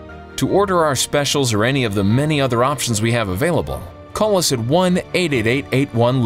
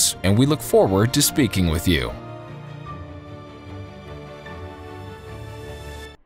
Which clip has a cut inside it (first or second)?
second